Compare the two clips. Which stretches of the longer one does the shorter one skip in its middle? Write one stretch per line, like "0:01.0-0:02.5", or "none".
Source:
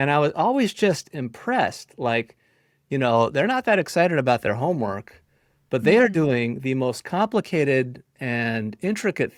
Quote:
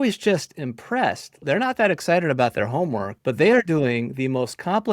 0:02.0-0:03.3
0:05.0-0:05.6